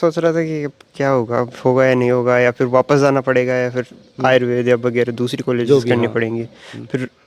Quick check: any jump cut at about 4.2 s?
no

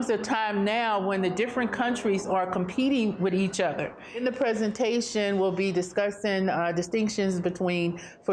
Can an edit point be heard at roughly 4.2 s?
yes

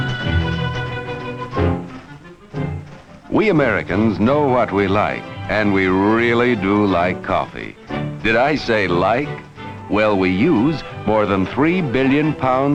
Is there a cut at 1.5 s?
no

